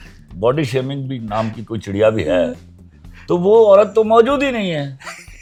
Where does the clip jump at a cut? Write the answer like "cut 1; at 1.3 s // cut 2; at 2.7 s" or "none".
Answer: none